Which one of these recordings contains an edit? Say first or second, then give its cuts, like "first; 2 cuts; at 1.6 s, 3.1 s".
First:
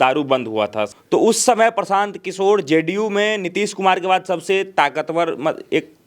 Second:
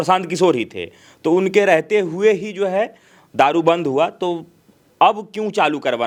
first; 1 cut; at 0.9 s